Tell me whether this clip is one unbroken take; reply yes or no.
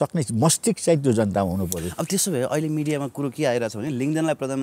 yes